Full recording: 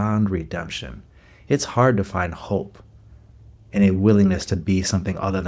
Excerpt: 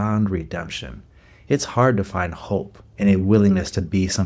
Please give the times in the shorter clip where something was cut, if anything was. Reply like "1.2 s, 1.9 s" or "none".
2.8 s